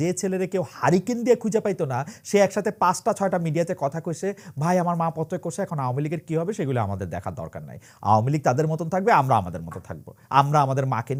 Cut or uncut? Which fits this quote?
uncut